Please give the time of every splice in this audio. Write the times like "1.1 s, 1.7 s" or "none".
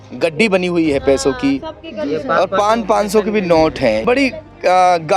4.0 s